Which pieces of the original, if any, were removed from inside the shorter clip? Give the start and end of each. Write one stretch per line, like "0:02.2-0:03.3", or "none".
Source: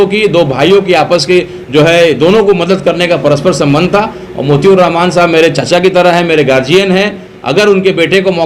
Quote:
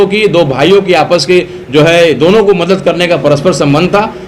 none